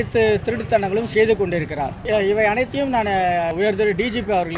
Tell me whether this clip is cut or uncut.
cut